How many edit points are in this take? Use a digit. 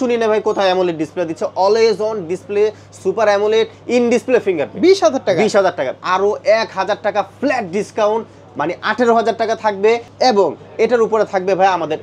2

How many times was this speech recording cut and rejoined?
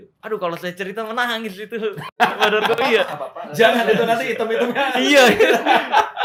0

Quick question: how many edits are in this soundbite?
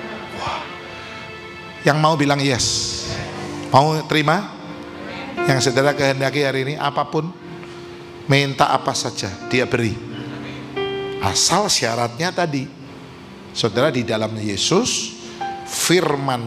0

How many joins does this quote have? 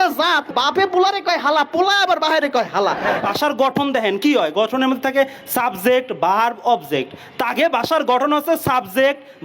1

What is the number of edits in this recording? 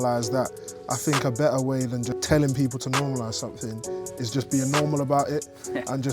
1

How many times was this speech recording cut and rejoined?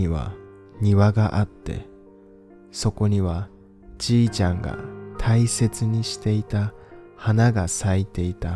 0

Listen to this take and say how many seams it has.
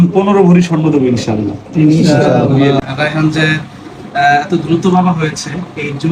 1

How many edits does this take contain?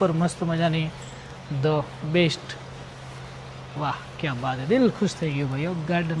0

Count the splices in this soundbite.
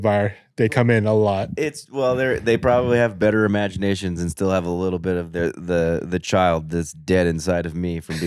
0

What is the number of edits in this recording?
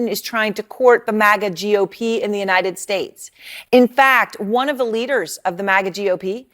1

